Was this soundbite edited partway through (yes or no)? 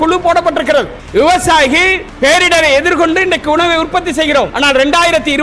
yes